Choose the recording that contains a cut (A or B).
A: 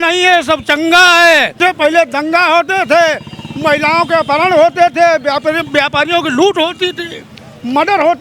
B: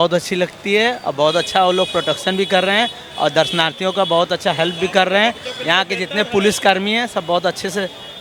A